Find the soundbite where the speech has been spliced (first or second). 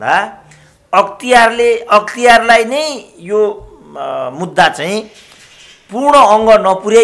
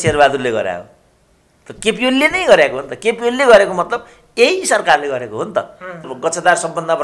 second